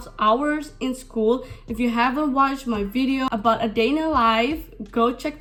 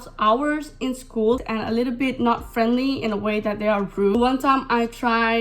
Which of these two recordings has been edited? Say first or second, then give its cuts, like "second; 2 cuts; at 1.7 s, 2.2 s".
second; 2 cuts; at 1.5 s, 4.1 s